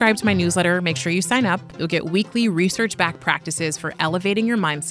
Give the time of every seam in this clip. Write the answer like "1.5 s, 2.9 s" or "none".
1.7 s